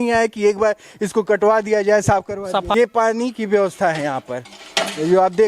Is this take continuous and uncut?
no; 1 cut; at 2.7 s

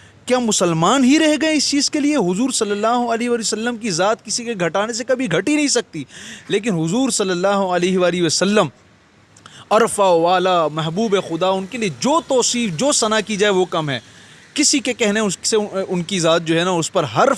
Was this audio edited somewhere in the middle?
no; 0 cuts

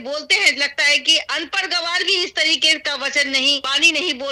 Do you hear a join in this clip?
no; 0 cuts

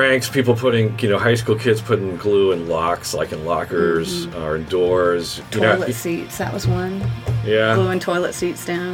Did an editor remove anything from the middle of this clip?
yes; 1 cut; at 5.4 s

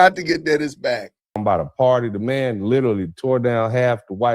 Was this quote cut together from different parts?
yes; 1 cut; at 1.4 s

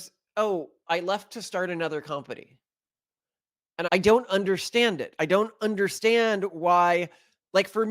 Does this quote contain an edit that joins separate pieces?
yes; 1 cut; at 3.8 s

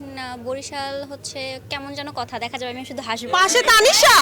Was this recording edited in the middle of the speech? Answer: no; 0 cuts

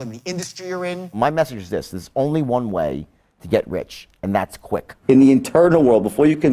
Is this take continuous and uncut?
no; 2 cuts; at 1.2 s, 4.9 s

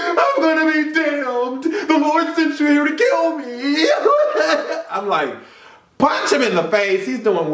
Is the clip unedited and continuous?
yes; 0 cuts

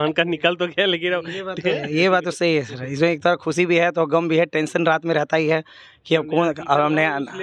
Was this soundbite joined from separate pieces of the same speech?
no; 0 cuts

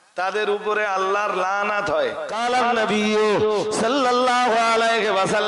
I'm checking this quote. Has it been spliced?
yes; 1 cut; at 2.3 s

